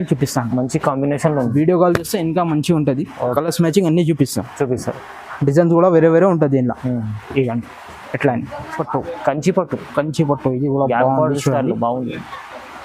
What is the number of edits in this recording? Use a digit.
1